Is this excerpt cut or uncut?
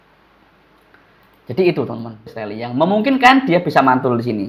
cut